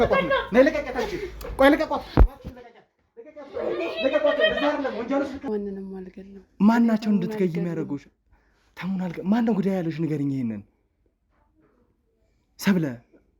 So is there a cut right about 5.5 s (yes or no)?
yes